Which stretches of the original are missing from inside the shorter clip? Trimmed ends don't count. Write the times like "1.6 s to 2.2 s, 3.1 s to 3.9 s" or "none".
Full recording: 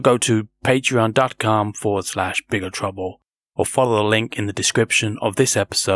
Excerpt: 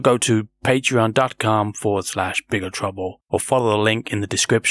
3.2 s to 3.5 s

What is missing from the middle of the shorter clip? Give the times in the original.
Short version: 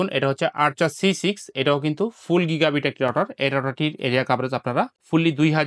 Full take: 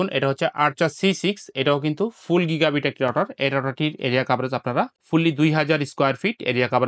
none

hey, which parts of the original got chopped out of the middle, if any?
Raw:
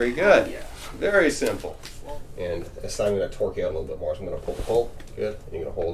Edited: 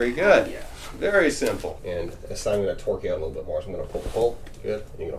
1.8 s to 2.3 s

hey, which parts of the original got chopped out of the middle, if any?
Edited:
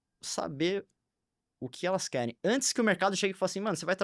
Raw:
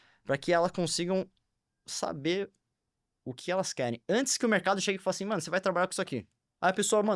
none

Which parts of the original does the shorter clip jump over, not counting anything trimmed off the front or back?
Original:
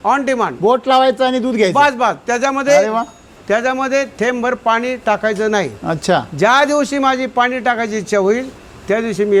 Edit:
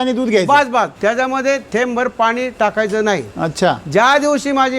2.2 s to 3.4 s

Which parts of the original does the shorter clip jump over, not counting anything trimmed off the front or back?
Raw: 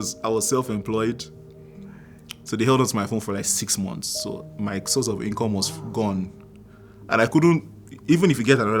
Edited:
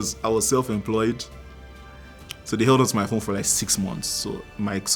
none

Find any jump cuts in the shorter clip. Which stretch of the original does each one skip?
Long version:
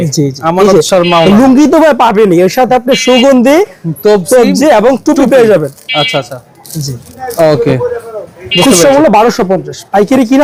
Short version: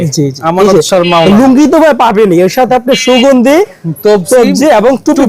none

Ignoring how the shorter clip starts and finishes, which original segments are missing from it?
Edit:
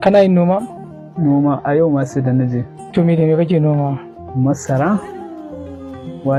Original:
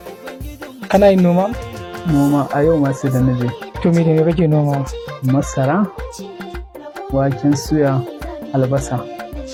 none

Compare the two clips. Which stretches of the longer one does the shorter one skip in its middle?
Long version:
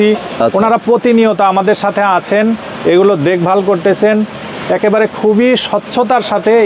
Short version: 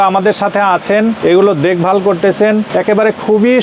2.6 s to 2.8 s, 4.3 s to 4.6 s

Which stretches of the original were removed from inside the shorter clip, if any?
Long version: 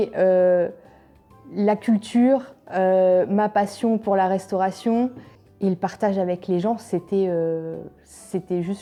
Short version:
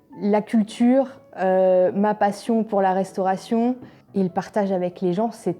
5.3 s to 5.4 s

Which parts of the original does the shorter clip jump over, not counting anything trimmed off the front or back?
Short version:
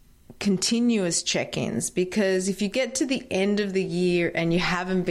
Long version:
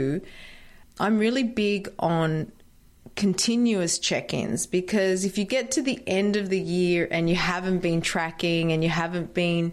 none

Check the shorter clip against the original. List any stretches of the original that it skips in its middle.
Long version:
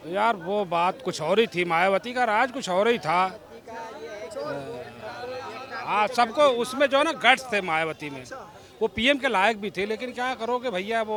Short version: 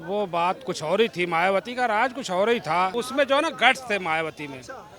3.3 s to 6.6 s

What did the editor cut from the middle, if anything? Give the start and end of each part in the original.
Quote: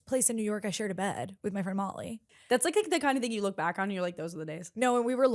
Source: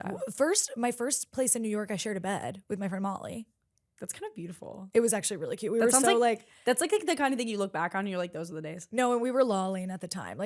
3.6 s to 6.5 s

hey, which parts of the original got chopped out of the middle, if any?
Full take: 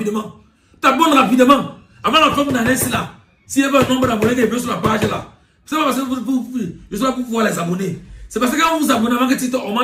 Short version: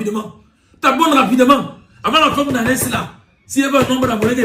none

